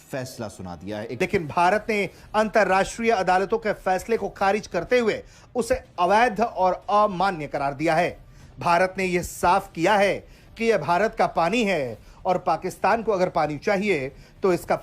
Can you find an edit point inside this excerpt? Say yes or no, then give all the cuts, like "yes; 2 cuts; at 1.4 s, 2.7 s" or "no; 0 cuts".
yes; 1 cut; at 1.1 s